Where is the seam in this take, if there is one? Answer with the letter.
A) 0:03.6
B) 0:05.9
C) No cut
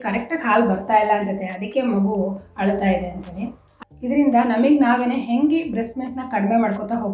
A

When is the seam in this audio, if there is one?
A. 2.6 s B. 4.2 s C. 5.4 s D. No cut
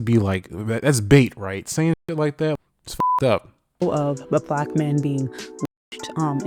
A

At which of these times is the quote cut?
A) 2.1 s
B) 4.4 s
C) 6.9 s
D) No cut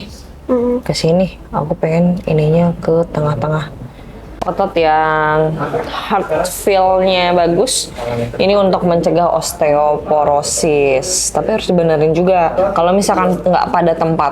B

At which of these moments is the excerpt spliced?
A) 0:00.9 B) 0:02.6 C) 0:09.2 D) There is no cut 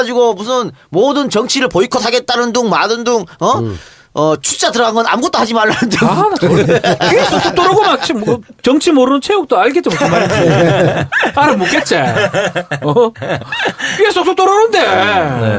D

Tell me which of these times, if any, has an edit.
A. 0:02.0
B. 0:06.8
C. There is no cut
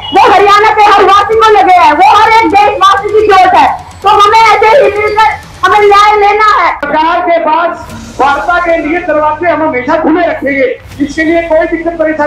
B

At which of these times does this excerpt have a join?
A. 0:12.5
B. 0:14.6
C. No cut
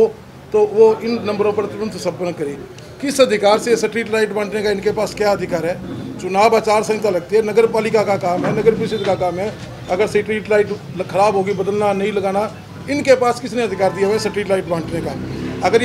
C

